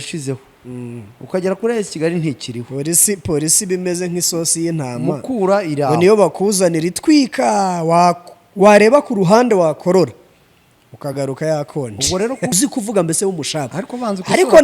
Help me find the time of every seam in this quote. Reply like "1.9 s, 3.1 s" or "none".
12.5 s